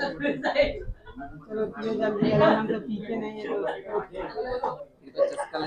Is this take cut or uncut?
cut